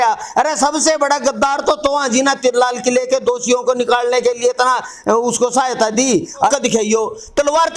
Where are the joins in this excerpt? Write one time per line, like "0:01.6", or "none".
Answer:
0:06.5